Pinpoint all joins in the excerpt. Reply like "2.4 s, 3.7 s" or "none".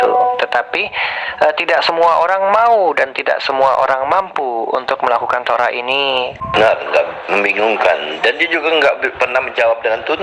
6.4 s

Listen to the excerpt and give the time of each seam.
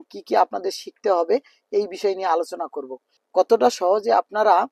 none

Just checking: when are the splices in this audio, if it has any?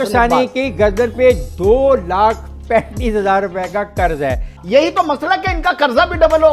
4.5 s

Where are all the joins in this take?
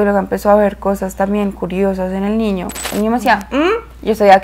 2.8 s

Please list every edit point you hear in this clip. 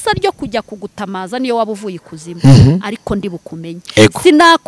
none

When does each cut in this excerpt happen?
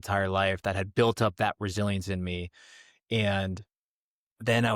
none

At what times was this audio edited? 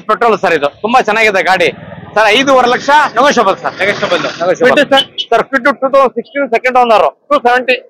none

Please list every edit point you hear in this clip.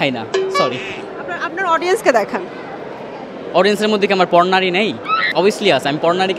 none

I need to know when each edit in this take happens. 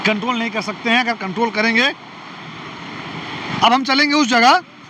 3.4 s

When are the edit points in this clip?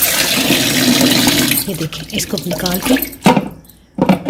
none

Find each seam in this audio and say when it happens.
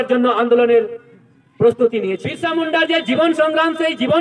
2.3 s

